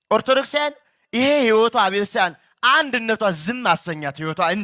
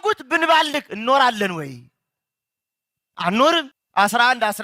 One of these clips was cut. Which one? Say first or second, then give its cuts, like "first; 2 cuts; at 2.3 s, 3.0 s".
second; 1 cut; at 3.6 s